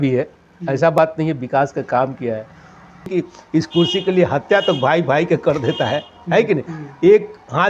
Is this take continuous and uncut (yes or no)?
no